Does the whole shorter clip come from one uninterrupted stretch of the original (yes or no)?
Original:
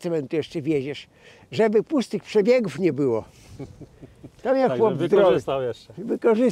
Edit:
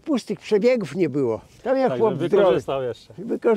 no